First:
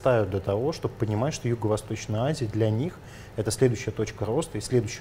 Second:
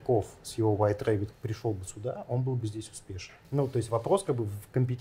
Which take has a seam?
second; 2 cuts; at 1.3 s, 3.4 s

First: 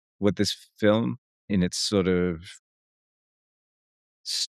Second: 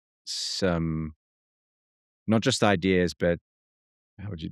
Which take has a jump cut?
first; 1 cut; at 1.5 s

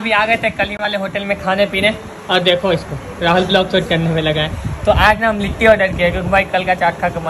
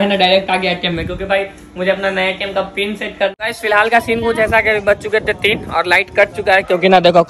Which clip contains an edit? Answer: second; 1 cut; at 3.4 s

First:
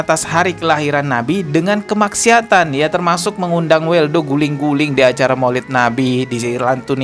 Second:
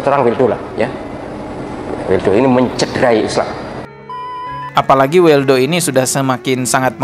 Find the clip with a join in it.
second; 1 cut; at 4.3 s

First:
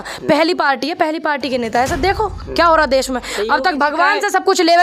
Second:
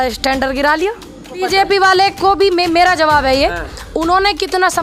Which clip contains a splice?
second; 1 cut; at 1.4 s

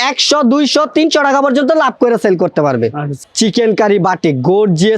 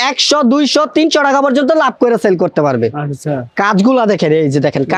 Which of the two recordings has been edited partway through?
first; 1 cut; at 3.2 s

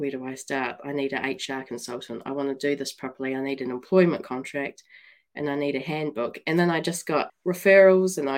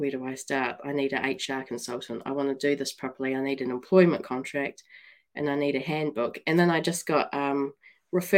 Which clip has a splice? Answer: first; 1 cut; at 7.3 s

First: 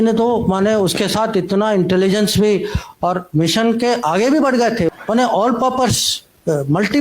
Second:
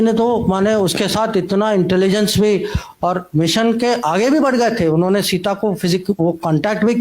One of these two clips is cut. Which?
first; 1 cut; at 4.9 s

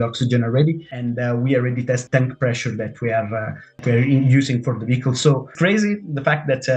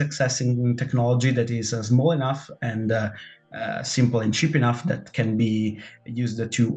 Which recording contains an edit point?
first; 4 cuts; at 0.9 s, 2.0 s, 3.8 s, 5.5 s

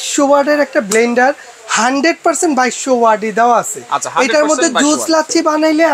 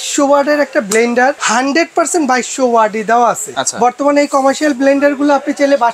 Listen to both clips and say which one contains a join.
second; 2 cuts; at 1.4 s, 3.6 s

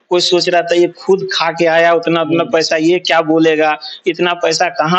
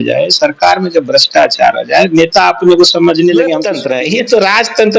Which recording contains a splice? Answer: second; 1 cut; at 3.7 s

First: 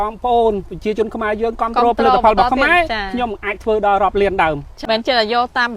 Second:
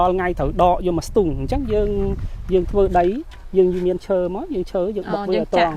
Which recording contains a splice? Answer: first; 1 cut; at 4.7 s

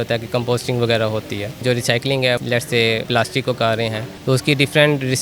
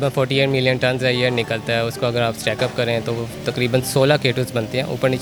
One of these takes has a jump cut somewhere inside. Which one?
first; 3 cuts; at 1.6 s, 2.9 s, 4.1 s

